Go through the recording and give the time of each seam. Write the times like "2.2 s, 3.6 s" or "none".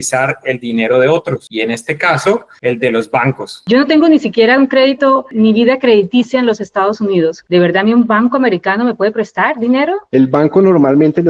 1.5 s, 2.5 s, 3.6 s, 10.0 s

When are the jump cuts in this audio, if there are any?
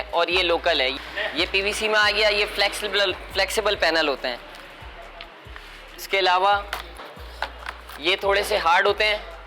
none

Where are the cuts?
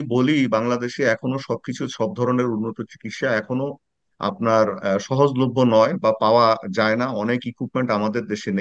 none

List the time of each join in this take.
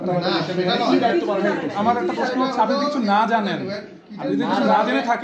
none

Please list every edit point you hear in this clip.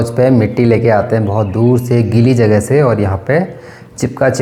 none

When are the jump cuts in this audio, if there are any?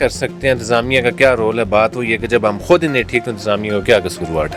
none

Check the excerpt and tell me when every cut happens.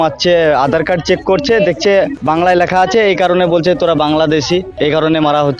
2.2 s, 4.7 s

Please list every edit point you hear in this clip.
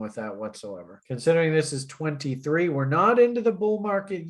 0.9 s

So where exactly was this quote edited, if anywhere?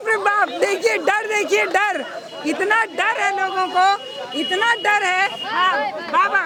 none

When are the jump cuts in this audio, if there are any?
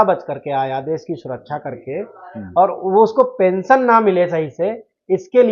none

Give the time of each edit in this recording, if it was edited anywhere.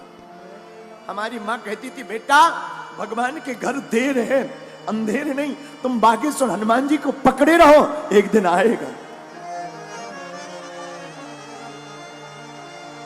none

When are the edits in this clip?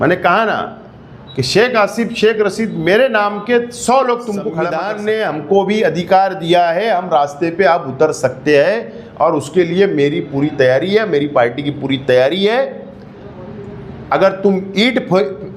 4.8 s

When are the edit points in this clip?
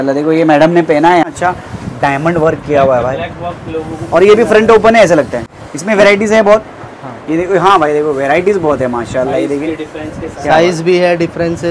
1.3 s, 5.4 s

